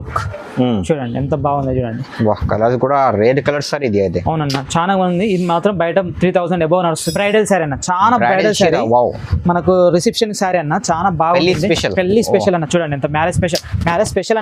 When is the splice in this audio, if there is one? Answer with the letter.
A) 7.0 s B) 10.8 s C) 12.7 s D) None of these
A